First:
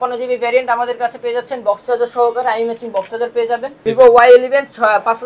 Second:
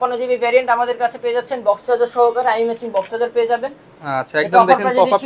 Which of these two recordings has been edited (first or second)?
first